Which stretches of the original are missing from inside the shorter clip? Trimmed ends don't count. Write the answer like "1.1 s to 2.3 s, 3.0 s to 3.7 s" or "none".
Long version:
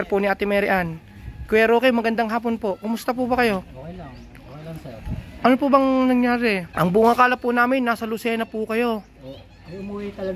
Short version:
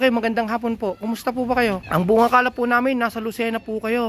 3.6 s to 6.7 s